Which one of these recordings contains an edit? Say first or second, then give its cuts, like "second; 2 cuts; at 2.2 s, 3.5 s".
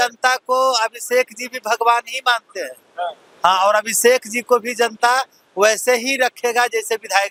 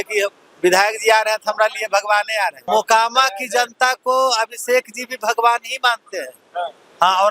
second; 1 cut; at 2.6 s